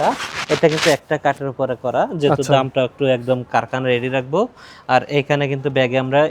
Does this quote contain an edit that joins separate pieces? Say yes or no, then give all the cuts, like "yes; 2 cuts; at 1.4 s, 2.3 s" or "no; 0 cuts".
no; 0 cuts